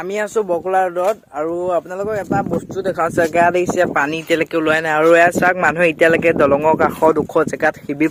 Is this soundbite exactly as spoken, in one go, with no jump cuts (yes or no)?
yes